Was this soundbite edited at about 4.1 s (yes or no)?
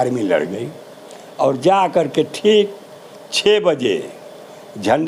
no